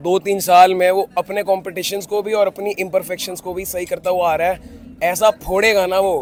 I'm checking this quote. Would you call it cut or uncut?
uncut